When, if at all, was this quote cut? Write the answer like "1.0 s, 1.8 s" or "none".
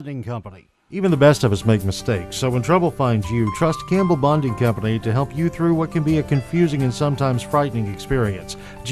1.0 s